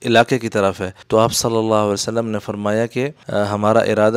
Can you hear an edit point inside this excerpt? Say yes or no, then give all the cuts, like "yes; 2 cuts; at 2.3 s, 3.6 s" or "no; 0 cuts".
yes; 2 cuts; at 0.9 s, 3.2 s